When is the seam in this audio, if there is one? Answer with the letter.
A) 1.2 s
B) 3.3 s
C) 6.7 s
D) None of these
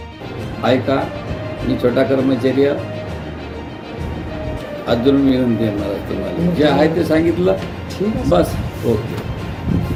D